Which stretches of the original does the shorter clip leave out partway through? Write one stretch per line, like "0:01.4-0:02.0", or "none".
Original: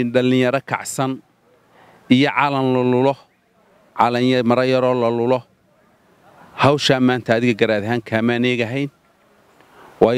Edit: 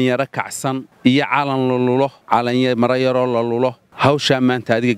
0:01.2-0:01.9
0:03.2-0:03.9
0:05.5-0:06.5